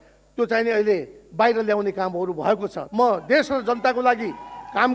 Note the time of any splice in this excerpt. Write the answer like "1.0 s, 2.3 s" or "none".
2.8 s